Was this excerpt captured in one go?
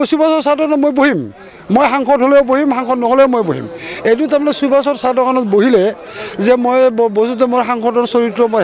yes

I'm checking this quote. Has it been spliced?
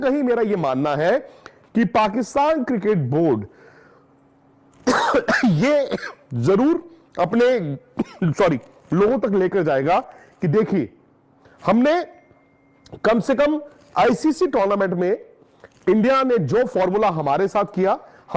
no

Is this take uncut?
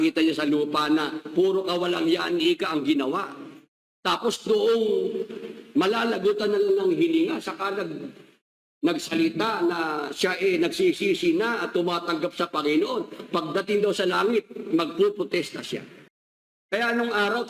no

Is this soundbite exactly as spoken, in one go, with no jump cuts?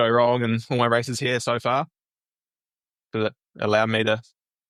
yes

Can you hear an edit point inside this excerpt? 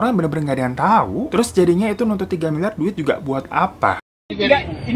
yes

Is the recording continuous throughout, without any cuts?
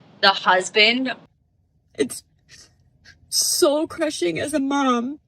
no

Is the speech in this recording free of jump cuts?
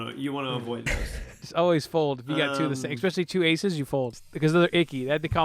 no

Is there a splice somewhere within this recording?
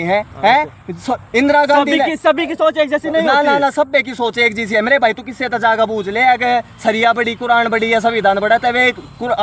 no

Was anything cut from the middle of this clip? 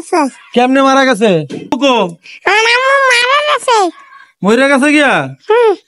yes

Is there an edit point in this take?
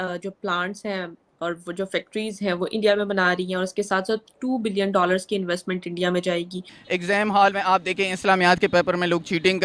yes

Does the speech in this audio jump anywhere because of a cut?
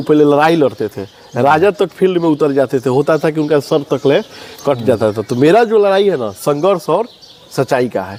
no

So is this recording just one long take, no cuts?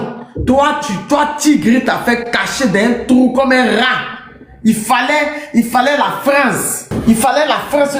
yes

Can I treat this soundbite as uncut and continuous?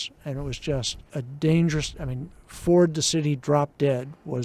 no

